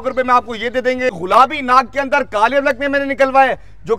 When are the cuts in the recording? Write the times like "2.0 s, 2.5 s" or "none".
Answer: 1.1 s